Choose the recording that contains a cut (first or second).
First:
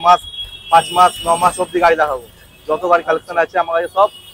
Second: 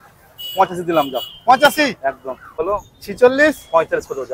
second